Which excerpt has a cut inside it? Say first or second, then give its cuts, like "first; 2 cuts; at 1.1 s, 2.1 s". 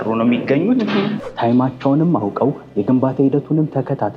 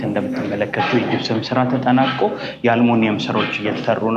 first; 1 cut; at 1.2 s